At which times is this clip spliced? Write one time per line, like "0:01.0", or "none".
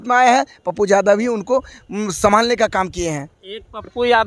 none